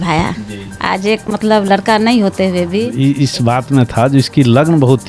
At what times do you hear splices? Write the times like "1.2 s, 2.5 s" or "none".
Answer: 2.8 s